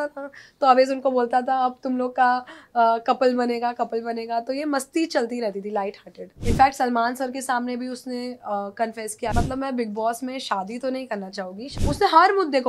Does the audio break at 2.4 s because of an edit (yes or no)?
no